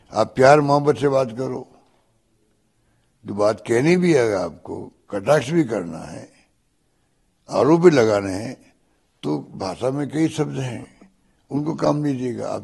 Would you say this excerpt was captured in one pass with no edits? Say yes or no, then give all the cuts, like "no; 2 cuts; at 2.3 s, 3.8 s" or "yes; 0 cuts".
yes; 0 cuts